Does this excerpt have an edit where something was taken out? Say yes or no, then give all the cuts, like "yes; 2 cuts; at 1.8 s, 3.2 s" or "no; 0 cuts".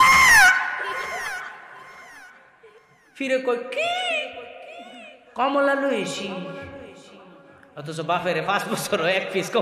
no; 0 cuts